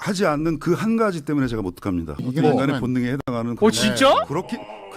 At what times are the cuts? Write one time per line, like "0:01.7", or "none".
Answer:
0:02.2